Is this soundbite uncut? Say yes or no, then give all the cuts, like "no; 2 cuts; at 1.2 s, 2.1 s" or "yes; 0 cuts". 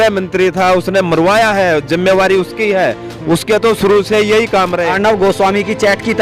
no; 1 cut; at 4.9 s